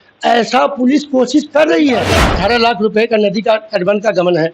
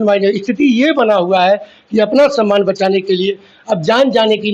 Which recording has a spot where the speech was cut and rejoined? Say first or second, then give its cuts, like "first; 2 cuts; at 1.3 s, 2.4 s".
first; 1 cut; at 2.2 s